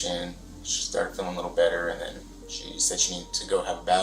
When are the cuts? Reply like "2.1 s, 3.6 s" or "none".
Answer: 2.2 s